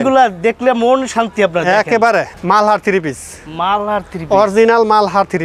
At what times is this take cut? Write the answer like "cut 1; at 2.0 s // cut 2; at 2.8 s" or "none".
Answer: cut 1; at 2.4 s